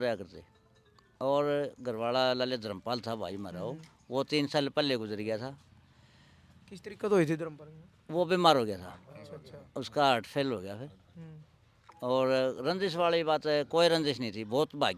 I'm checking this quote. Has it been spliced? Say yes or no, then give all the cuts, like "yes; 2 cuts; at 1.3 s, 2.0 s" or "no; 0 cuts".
no; 0 cuts